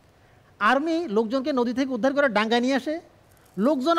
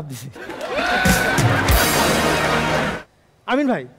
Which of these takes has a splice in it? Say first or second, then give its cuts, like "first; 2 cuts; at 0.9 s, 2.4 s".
second; 1 cut; at 3.0 s